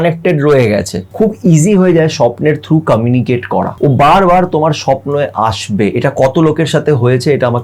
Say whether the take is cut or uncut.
cut